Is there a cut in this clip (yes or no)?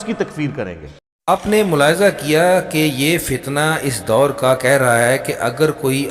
no